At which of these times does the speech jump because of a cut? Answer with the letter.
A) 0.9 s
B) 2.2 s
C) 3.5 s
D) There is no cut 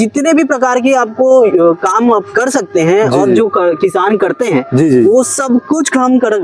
D